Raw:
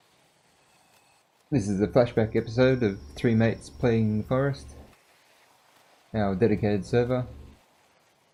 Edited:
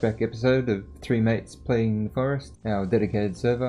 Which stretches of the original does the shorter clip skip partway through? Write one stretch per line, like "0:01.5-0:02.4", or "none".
0:04.7-0:06.0